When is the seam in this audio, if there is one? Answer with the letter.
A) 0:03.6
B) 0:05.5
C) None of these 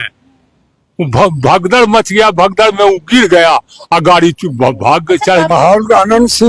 B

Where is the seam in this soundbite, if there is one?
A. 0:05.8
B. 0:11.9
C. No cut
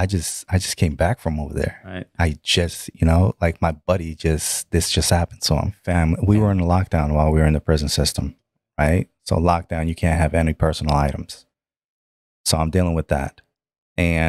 A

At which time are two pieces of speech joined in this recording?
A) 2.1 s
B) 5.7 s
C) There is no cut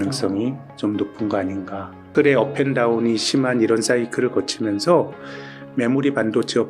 A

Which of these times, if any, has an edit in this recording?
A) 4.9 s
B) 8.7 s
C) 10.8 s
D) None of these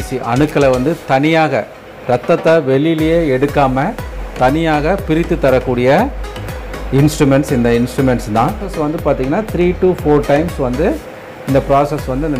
B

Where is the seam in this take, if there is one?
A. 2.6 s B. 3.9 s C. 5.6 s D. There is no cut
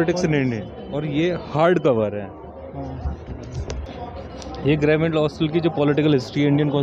B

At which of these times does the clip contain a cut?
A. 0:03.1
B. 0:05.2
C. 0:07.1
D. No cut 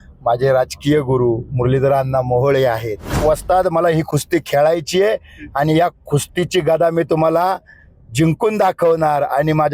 A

